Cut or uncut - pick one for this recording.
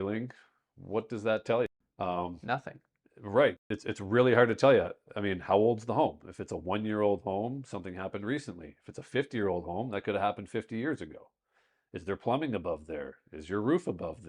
cut